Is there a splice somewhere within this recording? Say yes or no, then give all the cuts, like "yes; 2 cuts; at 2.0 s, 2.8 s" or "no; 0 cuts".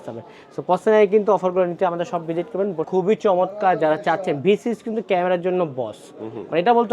yes; 1 cut; at 2.8 s